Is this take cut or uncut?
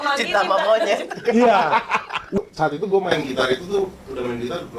cut